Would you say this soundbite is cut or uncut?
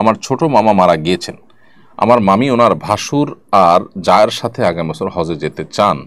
uncut